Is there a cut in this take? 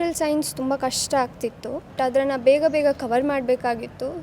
yes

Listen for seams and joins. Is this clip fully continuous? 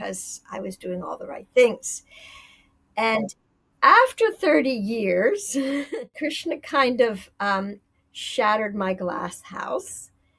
no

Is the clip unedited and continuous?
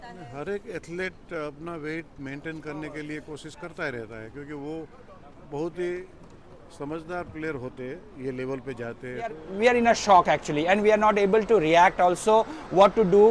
no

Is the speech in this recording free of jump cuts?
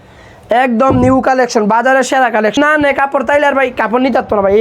no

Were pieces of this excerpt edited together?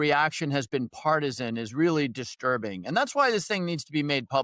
no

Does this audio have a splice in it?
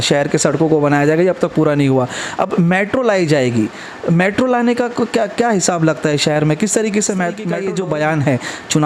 yes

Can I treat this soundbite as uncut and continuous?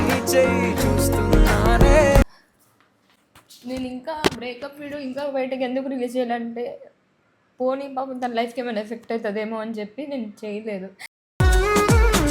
no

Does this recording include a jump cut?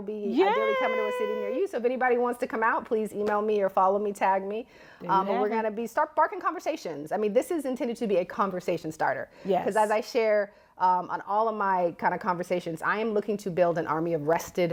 no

